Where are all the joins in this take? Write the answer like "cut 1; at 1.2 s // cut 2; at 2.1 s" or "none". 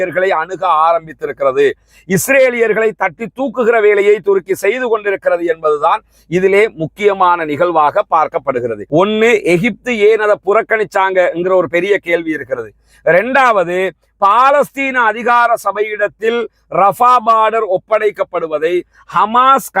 cut 1; at 8.8 s